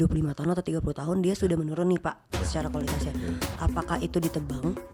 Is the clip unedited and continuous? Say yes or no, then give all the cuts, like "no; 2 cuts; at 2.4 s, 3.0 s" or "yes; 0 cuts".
yes; 0 cuts